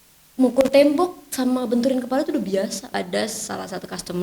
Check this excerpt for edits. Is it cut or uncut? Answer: cut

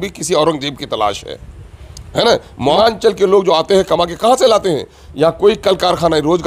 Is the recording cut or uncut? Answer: cut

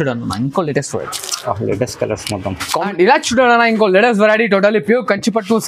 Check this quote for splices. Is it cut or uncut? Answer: cut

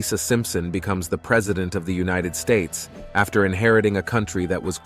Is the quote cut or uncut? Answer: uncut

